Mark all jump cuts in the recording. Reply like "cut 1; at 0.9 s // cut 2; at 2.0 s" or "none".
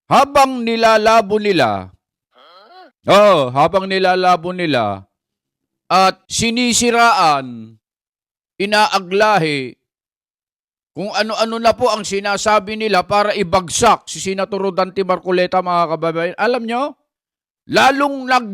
cut 1; at 6.2 s